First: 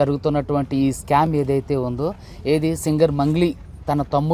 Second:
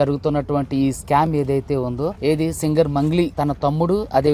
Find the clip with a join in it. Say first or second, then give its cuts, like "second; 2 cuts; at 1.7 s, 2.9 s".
second; 2 cuts; at 2.2 s, 3.3 s